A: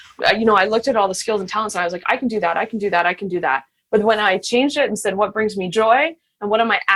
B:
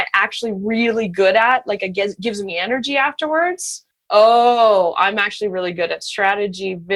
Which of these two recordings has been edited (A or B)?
B